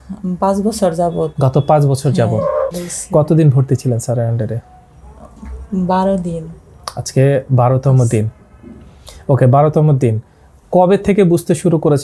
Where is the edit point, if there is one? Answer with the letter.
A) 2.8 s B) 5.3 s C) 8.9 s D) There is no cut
A